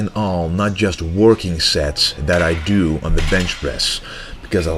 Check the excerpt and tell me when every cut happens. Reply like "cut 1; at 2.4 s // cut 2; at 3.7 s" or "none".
cut 1; at 3.0 s